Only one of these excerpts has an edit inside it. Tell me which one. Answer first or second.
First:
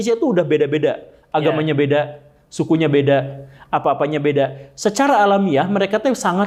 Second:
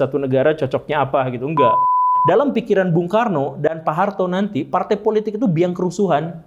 second